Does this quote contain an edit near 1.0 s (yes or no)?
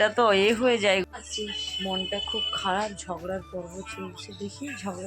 yes